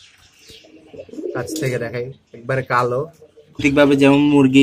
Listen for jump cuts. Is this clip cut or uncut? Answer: cut